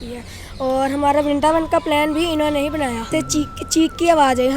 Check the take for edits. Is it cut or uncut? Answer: cut